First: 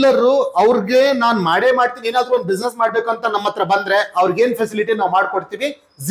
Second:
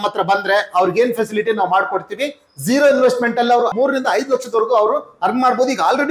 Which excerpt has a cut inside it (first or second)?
second